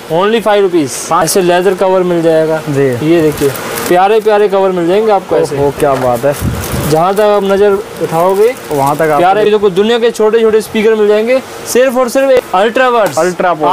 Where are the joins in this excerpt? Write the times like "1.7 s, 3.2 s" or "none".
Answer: 1.2 s, 9.5 s, 12.4 s